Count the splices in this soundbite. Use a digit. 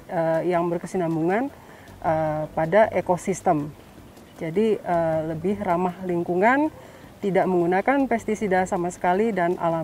0